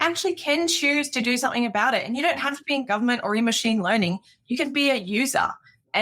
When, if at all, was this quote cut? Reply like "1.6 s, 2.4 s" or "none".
none